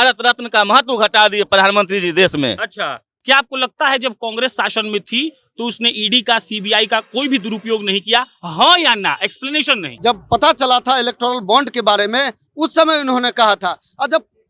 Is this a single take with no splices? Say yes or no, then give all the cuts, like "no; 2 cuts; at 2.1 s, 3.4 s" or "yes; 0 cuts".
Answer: no; 2 cuts; at 3.1 s, 9.8 s